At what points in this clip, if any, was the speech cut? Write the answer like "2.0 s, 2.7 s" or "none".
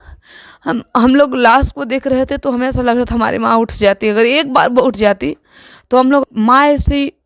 6.2 s